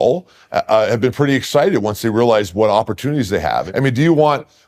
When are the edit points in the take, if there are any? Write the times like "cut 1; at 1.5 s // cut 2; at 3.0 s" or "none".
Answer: cut 1; at 3.7 s